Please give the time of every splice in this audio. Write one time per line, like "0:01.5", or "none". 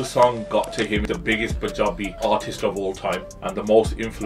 0:01.0
0:02.2
0:03.3